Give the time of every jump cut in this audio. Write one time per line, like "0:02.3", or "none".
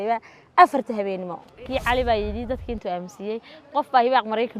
0:01.6